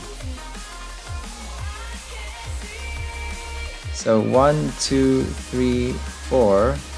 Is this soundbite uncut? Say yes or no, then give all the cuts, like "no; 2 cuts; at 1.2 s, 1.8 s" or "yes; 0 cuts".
yes; 0 cuts